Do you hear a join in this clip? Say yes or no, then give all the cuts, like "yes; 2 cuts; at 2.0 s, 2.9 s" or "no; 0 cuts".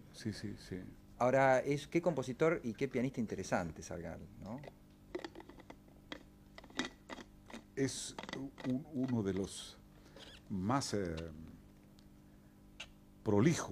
yes; 1 cut; at 5.6 s